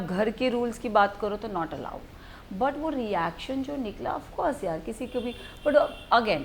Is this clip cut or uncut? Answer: uncut